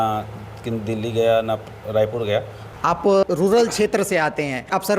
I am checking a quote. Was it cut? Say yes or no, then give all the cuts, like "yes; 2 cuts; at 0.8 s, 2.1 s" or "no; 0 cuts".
yes; 1 cut; at 2.6 s